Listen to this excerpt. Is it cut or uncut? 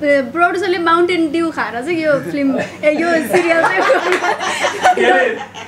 uncut